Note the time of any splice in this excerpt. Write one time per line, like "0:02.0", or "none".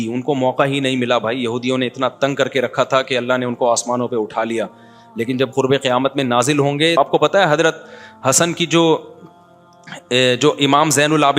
0:07.0

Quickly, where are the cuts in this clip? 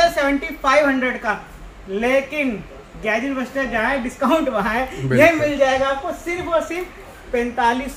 none

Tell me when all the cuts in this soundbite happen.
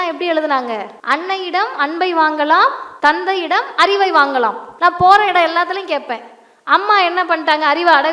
0:00.9
0:02.9
0:04.6

